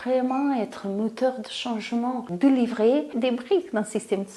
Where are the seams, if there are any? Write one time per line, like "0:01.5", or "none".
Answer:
0:02.3
0:03.1

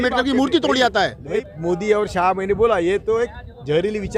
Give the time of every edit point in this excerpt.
0:01.4

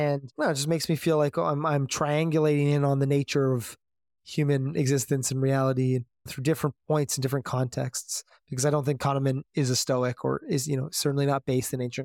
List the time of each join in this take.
0:06.3

